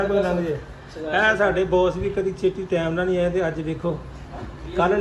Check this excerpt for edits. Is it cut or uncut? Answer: uncut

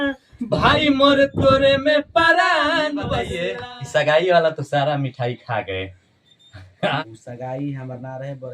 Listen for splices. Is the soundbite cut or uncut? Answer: cut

